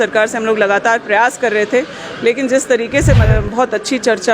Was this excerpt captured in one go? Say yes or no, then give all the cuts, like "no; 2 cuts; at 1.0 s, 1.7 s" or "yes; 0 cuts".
no; 1 cut; at 3.2 s